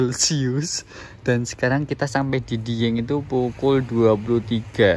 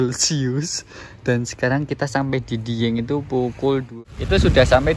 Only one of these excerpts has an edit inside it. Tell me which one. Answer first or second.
second